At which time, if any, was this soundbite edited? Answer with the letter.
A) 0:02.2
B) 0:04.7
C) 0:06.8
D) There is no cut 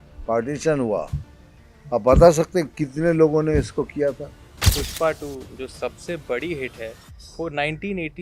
B